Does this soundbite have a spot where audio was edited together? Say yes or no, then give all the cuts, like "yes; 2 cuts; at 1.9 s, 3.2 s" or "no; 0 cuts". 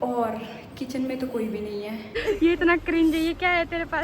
yes; 1 cut; at 2.1 s